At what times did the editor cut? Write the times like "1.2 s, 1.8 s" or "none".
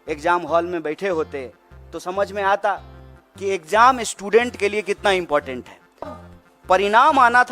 6.2 s